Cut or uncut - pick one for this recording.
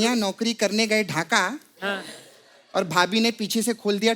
uncut